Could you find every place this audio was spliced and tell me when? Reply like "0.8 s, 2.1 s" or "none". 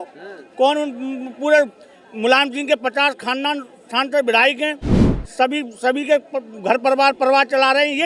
none